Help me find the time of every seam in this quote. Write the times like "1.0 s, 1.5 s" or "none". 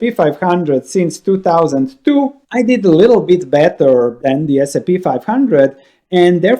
2.7 s